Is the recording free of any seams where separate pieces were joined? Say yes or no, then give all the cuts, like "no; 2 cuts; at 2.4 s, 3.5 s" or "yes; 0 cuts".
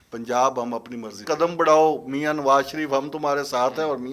no; 1 cut; at 1.2 s